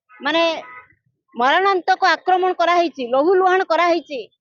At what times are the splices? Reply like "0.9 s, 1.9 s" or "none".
none